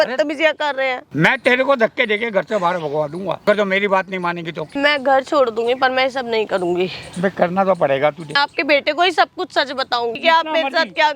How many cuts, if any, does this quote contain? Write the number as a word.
five